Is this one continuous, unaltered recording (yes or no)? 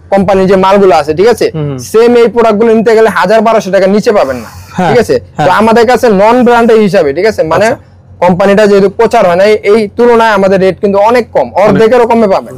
yes